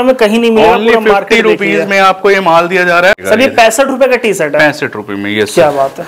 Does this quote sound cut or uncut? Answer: cut